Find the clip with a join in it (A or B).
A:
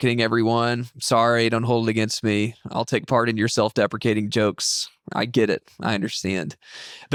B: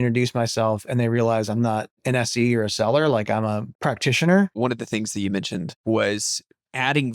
B